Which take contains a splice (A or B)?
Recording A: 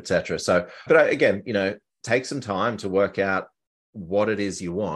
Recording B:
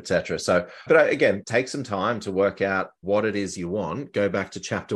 B